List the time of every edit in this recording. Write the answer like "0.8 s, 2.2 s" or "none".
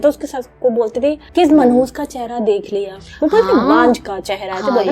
1.3 s